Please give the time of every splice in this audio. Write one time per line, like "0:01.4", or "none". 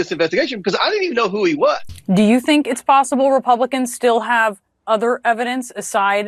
0:01.9